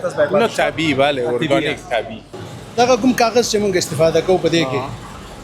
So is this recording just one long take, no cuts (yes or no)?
no